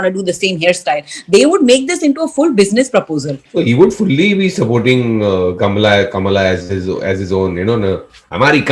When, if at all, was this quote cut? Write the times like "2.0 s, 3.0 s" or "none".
3.4 s